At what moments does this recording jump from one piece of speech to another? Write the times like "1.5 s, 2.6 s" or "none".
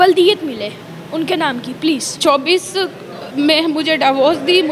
2.1 s